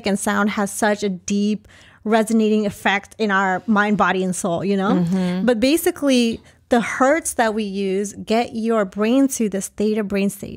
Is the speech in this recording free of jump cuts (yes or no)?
yes